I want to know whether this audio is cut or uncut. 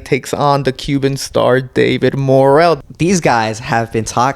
cut